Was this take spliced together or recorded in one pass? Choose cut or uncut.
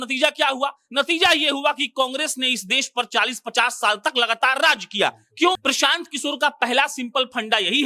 cut